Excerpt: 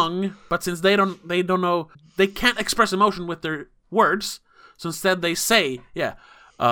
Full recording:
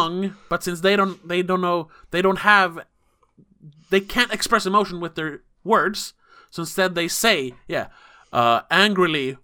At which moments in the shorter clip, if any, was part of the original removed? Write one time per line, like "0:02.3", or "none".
0:02.0